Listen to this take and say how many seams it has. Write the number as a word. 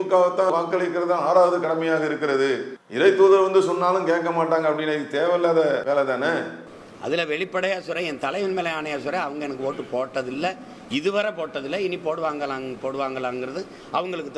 zero